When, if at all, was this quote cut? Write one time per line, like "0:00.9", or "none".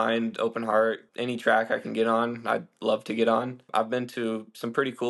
0:01.1
0:03.6